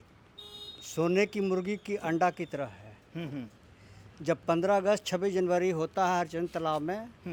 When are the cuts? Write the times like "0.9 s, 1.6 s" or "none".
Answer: none